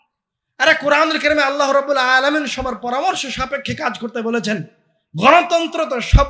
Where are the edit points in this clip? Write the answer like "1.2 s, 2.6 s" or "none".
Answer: none

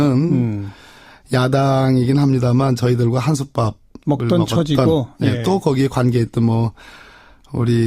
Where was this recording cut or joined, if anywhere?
2.8 s

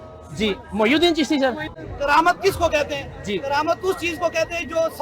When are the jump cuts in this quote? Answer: 1.7 s

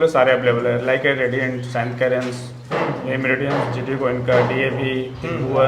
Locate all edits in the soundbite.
none

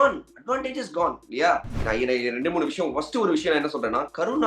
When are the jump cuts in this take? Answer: 1.7 s

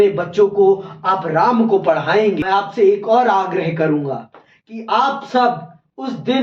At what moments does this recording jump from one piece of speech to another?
2.4 s

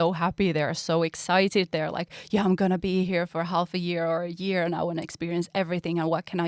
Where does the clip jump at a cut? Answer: none

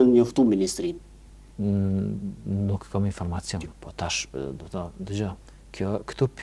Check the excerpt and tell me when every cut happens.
3.7 s

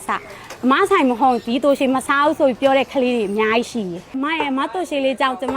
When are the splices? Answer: 4.1 s

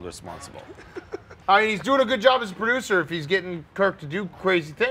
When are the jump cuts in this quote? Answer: 1.3 s

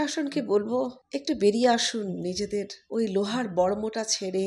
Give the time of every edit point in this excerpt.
1.1 s, 2.8 s

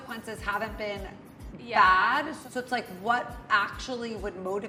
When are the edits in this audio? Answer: none

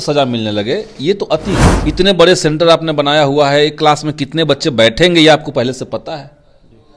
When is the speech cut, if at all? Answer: 1.7 s

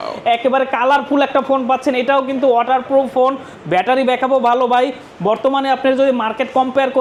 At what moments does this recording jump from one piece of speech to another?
none

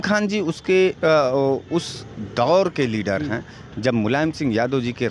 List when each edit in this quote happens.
none

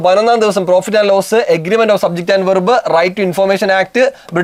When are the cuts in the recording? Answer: none

